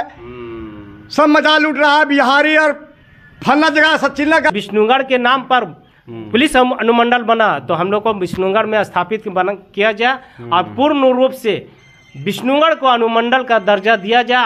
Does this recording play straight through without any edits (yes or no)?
no